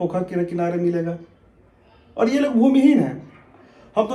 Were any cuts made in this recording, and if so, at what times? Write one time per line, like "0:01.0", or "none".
none